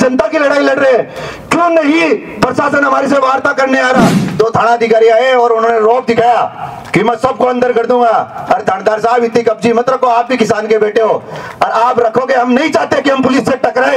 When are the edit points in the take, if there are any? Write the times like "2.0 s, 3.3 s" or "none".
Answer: 4.2 s